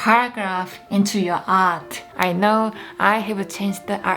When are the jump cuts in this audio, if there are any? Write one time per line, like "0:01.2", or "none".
0:02.1